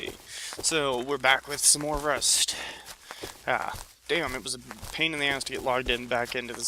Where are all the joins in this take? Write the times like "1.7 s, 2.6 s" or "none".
none

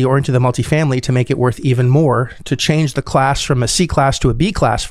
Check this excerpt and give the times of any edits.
none

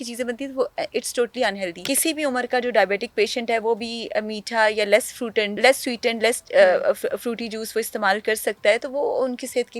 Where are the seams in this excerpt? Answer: 1.7 s, 5.6 s

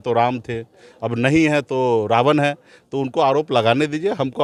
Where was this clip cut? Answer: none

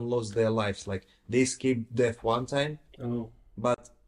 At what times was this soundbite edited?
none

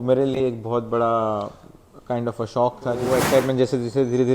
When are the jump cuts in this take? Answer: 3.1 s

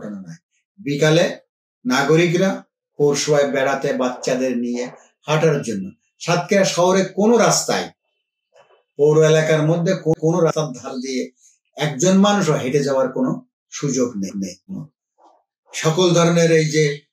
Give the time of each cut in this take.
14.7 s

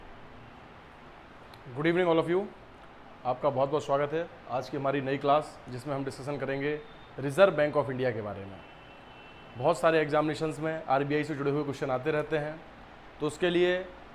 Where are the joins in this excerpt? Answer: 0.9 s

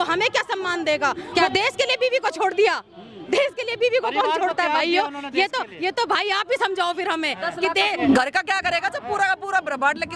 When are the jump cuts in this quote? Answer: 1.4 s, 8.0 s

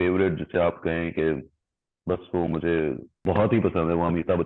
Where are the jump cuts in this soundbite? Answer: 3.1 s

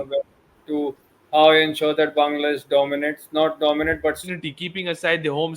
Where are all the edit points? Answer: 4.2 s

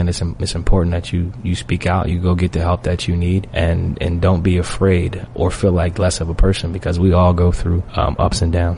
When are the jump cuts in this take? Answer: 3.5 s, 5.2 s, 7.9 s

